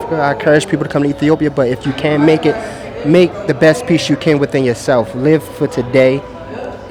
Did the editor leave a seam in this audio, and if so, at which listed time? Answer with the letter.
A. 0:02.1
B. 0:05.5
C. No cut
C